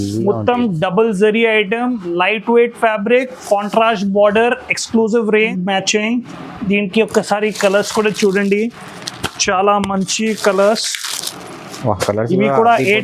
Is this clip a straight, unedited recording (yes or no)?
no